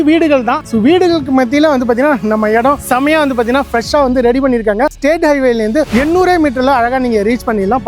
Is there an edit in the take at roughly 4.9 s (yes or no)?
yes